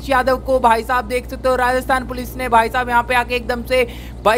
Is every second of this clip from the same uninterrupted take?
yes; 0 cuts

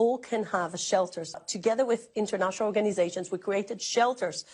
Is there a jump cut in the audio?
yes; 1 cut; at 1.4 s

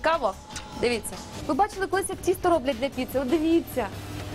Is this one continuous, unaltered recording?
no; 1 cut; at 1.1 s

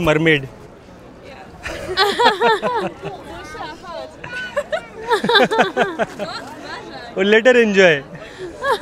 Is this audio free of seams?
yes; 0 cuts

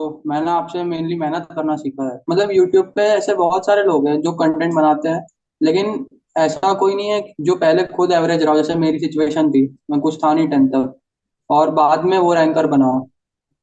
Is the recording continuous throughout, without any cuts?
no; 1 cut; at 2.1 s

